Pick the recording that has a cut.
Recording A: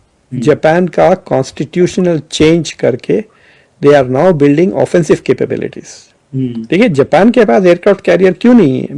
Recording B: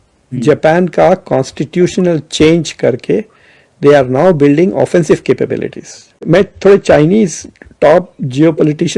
B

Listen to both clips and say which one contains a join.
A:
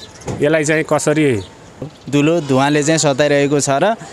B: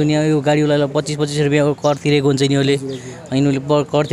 A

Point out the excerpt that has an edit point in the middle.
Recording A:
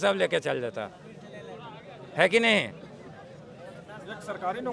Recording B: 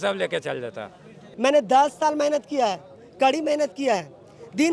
B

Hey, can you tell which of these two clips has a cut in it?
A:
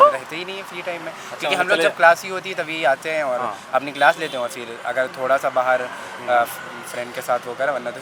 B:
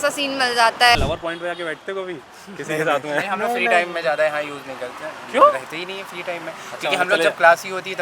B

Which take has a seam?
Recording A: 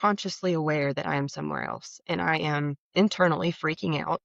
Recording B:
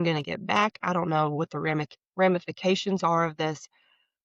A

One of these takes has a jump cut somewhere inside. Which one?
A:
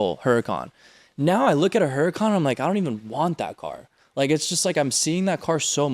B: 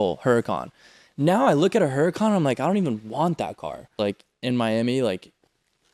B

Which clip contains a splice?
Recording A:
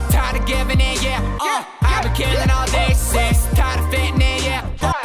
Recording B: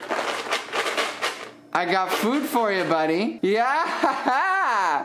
B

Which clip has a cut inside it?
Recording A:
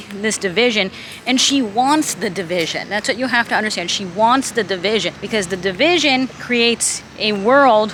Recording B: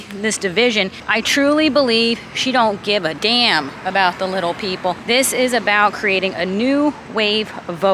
B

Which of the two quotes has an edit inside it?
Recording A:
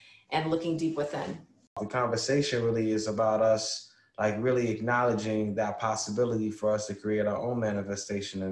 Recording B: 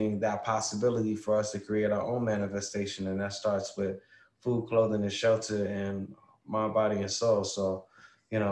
A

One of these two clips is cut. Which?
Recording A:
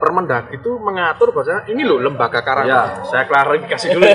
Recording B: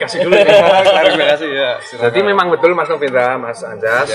A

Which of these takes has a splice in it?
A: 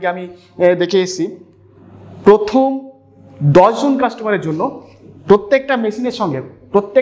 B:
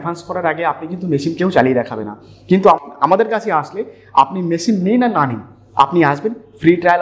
B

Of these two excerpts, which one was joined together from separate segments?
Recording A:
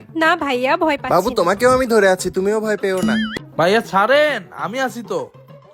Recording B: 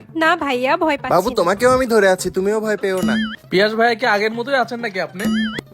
B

